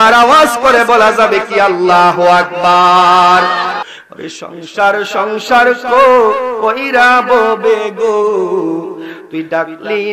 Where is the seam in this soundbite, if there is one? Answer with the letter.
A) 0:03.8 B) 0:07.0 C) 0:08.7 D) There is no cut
A